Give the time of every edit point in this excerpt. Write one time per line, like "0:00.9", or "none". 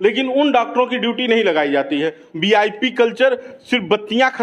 0:02.2